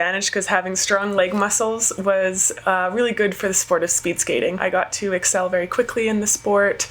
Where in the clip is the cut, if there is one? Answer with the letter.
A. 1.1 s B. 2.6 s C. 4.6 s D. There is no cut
C